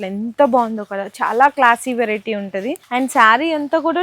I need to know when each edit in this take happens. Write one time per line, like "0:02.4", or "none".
0:02.8